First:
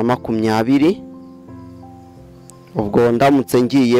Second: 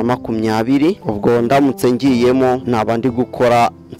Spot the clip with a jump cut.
second; 2 cuts; at 1.0 s, 2.6 s

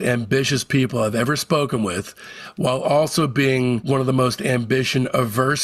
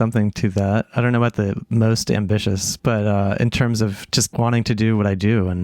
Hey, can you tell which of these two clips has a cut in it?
second; 1 cut; at 4.3 s

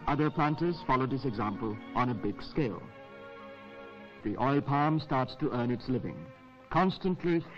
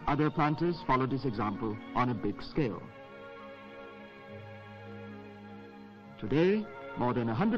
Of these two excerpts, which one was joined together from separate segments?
second; 1 cut; at 4.1 s

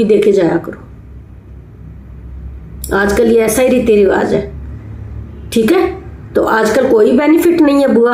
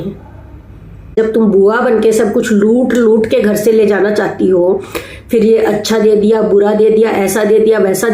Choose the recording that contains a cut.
second; 1 cut; at 1.1 s

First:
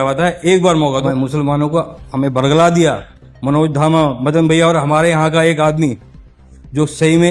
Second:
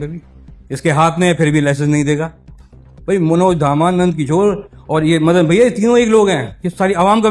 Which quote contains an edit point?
first; 1 cut; at 1.0 s

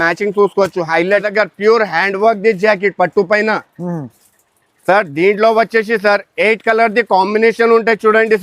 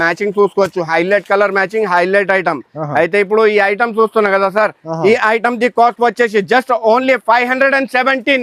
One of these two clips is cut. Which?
first; 1 cut; at 1.2 s

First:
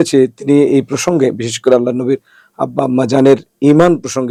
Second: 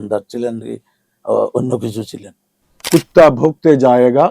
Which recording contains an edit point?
second; 1 cut; at 2.8 s

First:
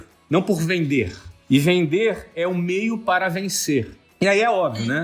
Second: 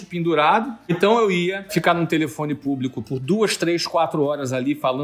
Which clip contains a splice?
second; 2 cuts; at 1.0 s, 1.7 s

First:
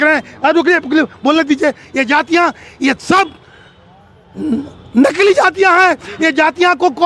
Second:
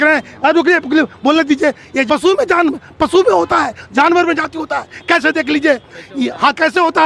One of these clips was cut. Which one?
second; 1 cut; at 2.1 s

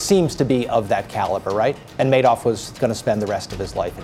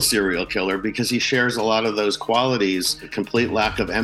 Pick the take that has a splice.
second; 1 cut; at 3.1 s

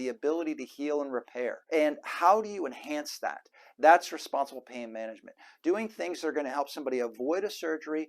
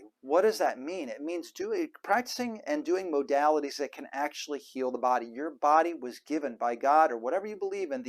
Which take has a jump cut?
first; 1 cut; at 1.6 s

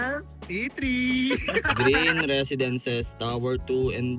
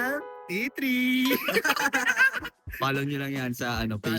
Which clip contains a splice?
first; 1 cut; at 1.7 s

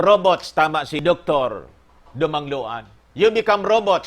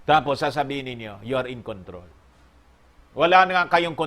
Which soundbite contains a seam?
first; 2 cuts; at 1.0 s, 3.0 s

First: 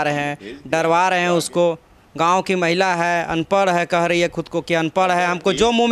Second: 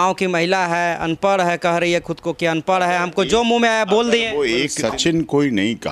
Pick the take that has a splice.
second; 1 cut; at 4.8 s

